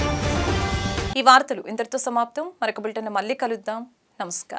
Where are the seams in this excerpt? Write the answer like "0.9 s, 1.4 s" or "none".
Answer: none